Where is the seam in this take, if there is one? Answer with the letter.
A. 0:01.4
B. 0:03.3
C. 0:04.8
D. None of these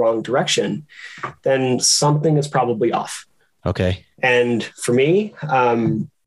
D